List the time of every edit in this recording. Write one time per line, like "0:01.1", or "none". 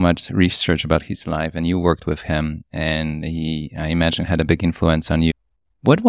none